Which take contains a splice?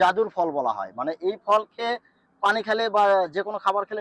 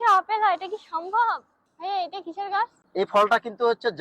second; 2 cuts; at 1.5 s, 2.8 s

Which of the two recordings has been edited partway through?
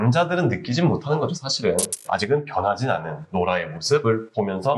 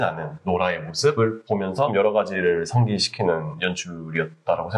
first; 1 cut; at 2.0 s

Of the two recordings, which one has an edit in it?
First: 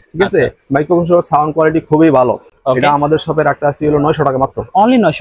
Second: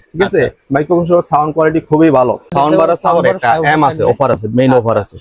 second; 1 cut; at 2.5 s

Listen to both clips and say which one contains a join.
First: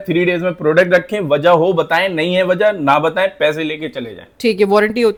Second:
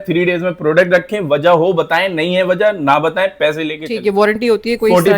second; 1 cut; at 3.8 s

